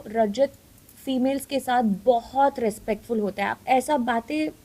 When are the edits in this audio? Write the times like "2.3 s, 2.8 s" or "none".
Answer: 3.6 s